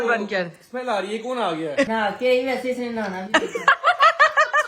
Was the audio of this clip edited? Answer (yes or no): yes